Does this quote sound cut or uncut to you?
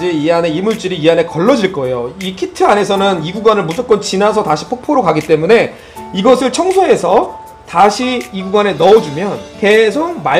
cut